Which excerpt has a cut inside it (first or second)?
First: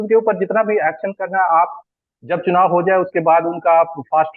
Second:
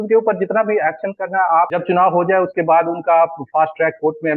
second